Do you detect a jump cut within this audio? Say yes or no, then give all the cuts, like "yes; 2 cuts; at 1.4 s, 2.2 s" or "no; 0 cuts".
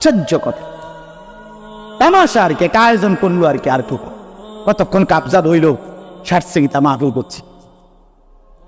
no; 0 cuts